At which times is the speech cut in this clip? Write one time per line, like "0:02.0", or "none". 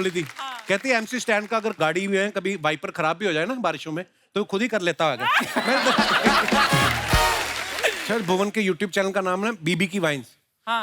0:08.0